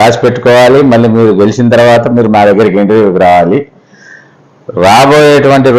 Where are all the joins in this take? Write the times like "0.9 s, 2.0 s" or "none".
none